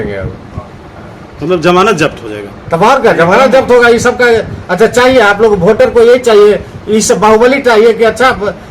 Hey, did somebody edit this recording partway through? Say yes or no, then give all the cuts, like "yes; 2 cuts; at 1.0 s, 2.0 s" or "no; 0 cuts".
no; 0 cuts